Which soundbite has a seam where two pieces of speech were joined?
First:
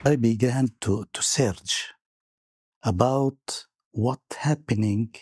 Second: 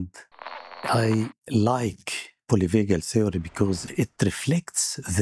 second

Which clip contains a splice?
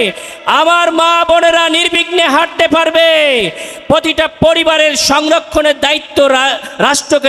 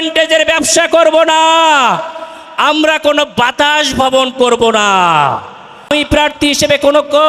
second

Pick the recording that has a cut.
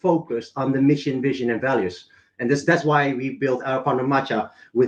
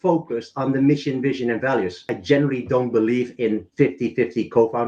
second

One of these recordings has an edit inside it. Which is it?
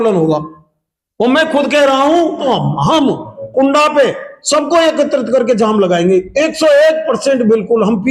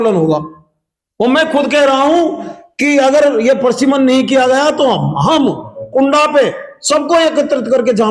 first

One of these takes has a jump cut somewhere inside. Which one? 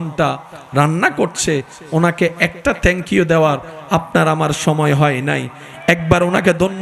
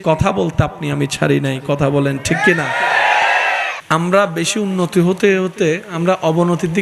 second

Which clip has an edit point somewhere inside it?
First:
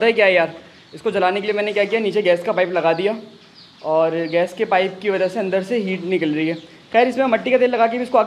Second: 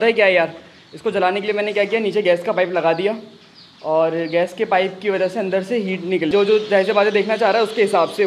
second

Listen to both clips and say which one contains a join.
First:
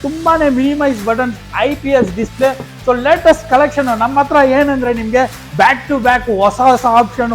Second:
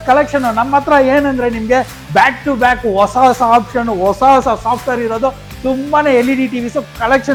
first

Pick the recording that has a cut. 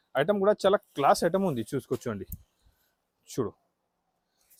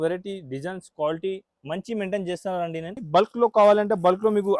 second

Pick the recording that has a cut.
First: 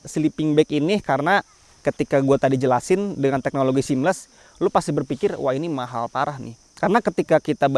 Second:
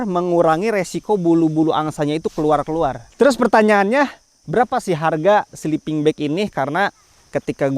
second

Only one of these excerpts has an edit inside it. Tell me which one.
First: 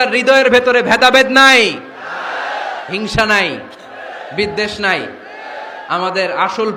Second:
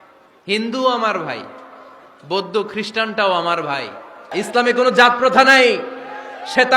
second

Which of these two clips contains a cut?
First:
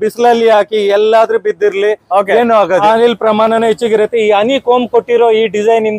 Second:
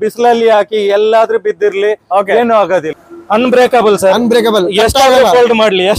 second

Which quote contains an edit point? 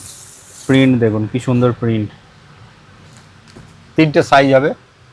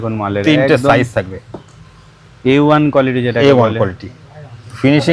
first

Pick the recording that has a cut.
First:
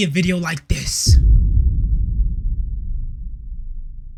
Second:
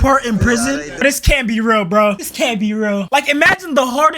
second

